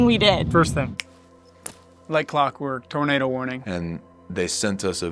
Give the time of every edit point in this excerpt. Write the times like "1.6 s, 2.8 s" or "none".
1.0 s, 3.6 s